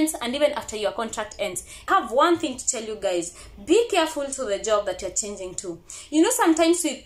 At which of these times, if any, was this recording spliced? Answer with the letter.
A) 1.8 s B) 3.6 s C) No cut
A